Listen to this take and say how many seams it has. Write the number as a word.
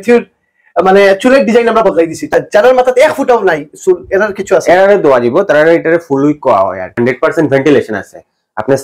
two